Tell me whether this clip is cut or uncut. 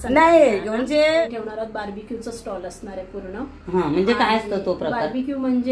cut